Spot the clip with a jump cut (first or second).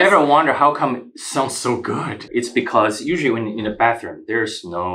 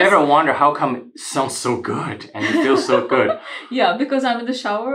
first